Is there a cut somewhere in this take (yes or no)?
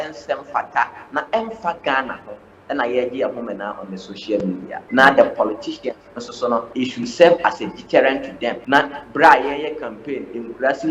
yes